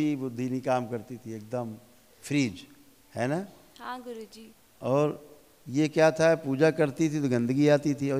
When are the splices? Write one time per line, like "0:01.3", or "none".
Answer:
none